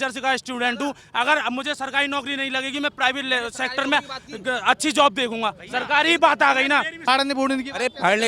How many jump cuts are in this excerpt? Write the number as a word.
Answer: one